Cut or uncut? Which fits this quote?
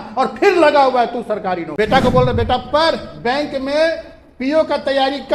cut